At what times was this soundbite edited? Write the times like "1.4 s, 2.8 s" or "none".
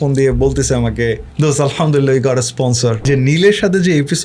3.1 s